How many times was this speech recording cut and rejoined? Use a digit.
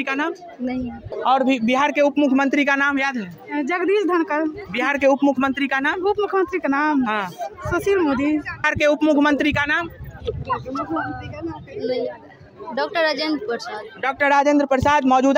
2